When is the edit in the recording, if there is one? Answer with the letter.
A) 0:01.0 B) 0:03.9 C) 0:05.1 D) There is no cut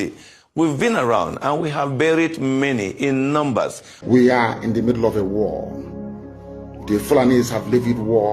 B